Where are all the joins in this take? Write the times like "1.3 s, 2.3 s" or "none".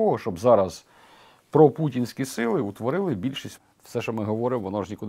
3.5 s